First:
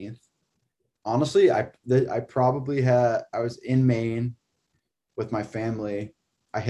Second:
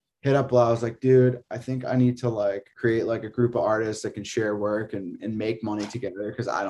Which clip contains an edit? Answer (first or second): second